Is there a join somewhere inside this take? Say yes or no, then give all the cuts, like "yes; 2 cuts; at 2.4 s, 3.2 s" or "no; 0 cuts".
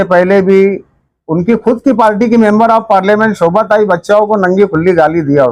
no; 0 cuts